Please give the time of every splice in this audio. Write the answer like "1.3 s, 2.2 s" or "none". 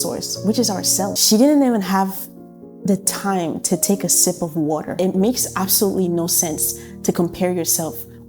1.2 s, 4.9 s